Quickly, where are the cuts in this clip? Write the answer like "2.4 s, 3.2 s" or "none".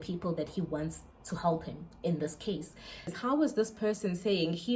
3.1 s